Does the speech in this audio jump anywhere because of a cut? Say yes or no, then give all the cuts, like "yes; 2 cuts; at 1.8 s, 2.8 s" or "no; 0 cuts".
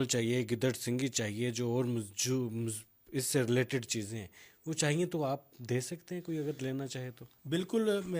no; 0 cuts